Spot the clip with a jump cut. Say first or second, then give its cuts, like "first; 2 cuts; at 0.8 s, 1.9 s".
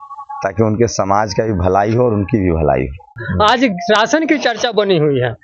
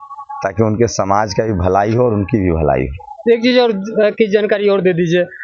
first; 1 cut; at 3.1 s